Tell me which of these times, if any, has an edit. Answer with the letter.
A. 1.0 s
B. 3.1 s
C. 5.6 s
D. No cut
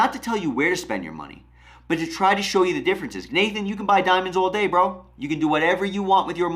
B